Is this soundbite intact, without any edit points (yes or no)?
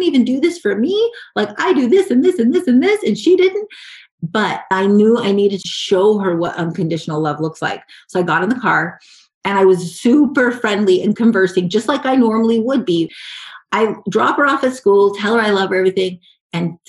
no